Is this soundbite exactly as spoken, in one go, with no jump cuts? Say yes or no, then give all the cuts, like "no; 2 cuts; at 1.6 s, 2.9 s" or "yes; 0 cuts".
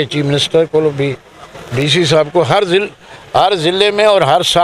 yes; 0 cuts